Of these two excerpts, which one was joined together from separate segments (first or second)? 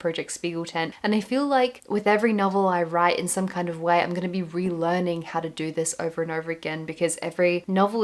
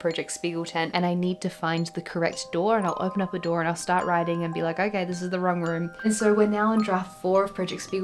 second